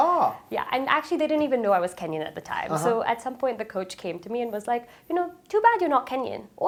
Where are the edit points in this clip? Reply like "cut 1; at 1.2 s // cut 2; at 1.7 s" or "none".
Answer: none